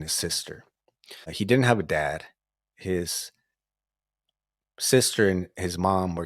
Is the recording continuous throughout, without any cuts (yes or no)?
no